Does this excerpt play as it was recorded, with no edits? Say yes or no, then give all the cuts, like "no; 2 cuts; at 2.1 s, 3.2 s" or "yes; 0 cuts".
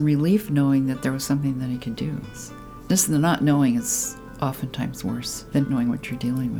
no; 1 cut; at 5.5 s